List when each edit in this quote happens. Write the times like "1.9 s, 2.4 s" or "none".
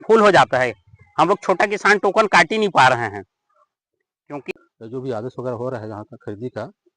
4.5 s